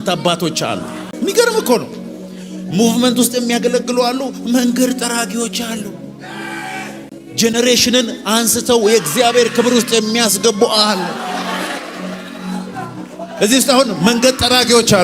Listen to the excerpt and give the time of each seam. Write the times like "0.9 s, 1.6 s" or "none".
1.0 s, 7.1 s